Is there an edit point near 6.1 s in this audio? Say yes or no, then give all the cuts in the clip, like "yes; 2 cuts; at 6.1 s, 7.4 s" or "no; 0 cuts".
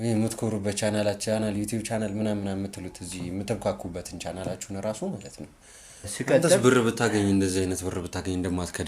yes; 1 cut; at 6.1 s